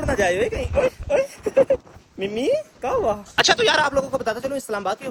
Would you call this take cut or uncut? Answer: uncut